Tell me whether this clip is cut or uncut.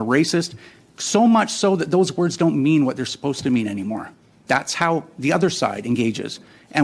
uncut